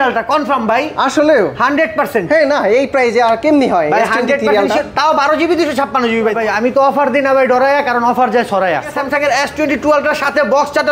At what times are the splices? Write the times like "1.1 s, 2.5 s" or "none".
6.4 s, 8.9 s